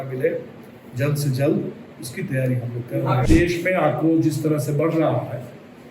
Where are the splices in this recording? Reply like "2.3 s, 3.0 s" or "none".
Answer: 3.2 s